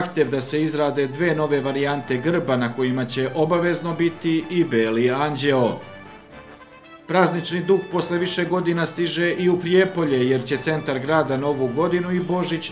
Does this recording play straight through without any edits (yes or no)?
yes